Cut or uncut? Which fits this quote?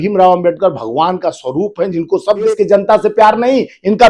cut